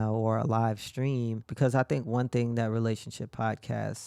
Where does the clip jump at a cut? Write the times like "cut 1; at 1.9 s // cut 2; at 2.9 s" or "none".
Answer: cut 1; at 1.4 s